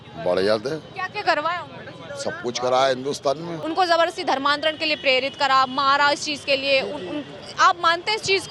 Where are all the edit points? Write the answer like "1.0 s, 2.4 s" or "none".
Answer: 3.5 s